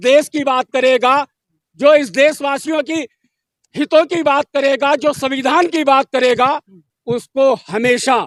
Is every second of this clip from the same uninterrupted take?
yes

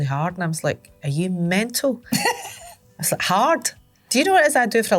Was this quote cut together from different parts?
no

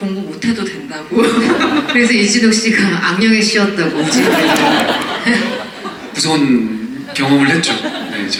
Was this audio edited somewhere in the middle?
no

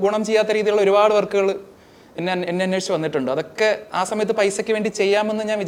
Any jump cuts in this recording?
no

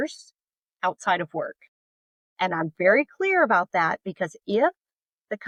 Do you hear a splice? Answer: no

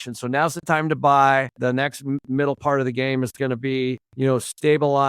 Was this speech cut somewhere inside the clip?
no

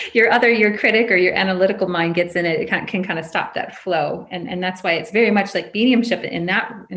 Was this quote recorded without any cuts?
yes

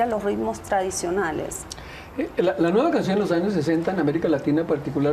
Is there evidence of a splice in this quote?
no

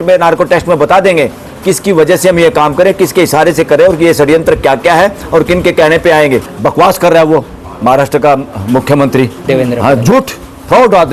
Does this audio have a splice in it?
yes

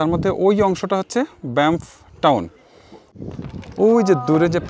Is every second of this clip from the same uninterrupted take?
no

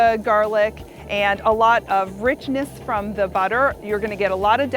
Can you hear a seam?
no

